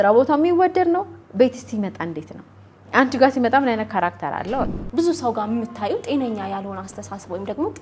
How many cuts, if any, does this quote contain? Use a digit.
1